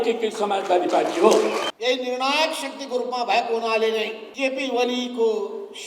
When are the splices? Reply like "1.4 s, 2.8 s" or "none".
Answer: 1.7 s, 4.2 s